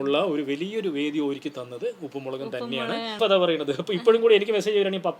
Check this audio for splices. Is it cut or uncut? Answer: cut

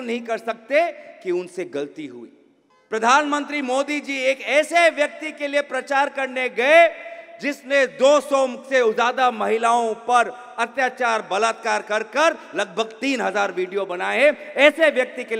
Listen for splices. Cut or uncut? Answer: cut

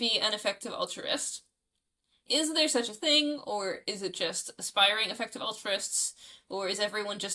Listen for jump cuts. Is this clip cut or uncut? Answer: uncut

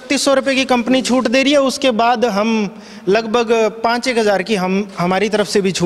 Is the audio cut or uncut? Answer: uncut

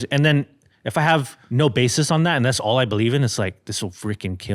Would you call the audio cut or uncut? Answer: cut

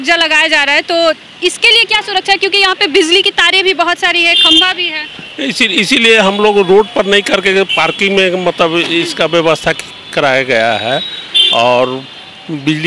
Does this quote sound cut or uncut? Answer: uncut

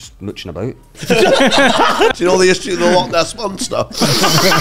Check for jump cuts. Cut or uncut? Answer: cut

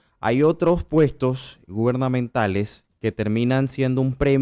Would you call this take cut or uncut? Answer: cut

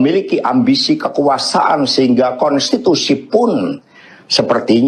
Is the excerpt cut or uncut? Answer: uncut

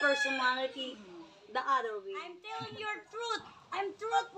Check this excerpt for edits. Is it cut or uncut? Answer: cut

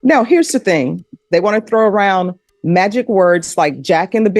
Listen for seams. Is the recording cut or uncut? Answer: cut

